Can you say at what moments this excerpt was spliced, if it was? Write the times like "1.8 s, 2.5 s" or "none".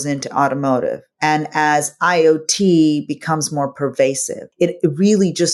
none